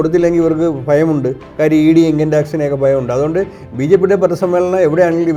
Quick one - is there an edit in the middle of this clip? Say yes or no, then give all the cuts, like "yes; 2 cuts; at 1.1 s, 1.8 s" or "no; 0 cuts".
no; 0 cuts